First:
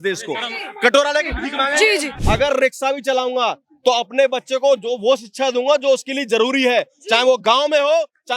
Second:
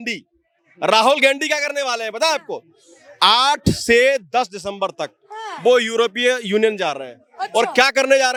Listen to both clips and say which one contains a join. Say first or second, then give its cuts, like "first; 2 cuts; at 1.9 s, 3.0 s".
first; 1 cut; at 2.1 s